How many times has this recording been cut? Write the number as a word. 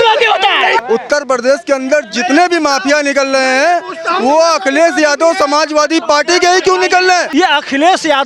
two